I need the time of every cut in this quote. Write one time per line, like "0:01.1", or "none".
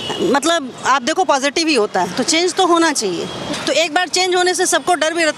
0:03.5